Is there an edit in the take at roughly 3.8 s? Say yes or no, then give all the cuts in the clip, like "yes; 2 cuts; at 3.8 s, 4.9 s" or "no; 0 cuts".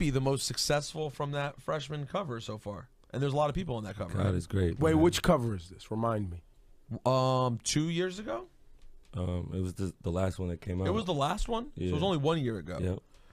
yes; 1 cut; at 3.8 s